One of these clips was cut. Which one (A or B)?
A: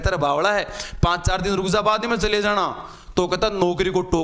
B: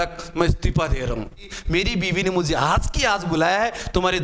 B